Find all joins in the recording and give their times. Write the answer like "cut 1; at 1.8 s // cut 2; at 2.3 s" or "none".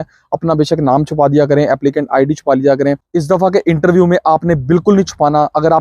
cut 1; at 3.0 s